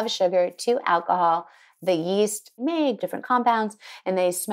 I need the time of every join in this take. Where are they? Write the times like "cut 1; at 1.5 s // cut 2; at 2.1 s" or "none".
cut 1; at 2.9 s